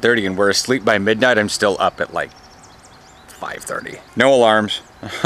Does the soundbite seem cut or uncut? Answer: cut